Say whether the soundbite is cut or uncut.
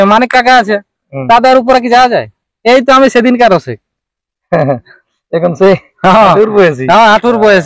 uncut